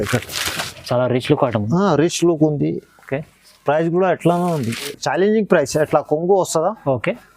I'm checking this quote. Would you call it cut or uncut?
cut